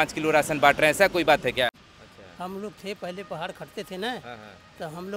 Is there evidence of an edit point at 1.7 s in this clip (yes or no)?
yes